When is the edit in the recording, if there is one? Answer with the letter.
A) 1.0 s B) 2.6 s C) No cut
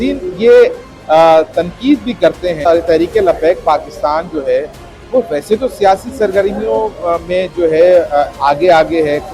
B